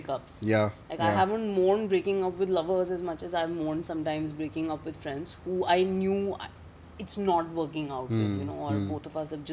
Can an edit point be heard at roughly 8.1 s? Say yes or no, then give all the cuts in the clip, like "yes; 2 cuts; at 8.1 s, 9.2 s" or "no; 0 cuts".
no; 0 cuts